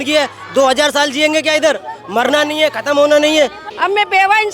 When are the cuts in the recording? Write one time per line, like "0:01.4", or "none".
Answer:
0:03.6